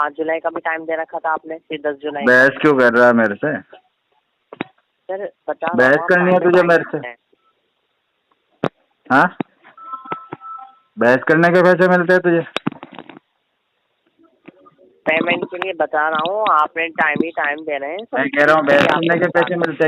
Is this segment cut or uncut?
uncut